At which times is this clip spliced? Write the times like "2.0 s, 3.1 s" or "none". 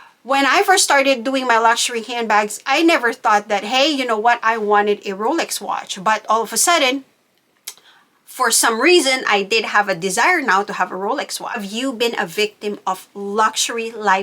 11.7 s